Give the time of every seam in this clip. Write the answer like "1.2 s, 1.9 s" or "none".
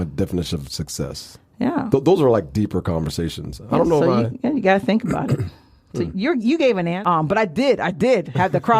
6.9 s